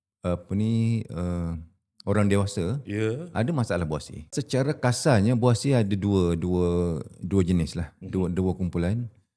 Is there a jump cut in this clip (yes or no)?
yes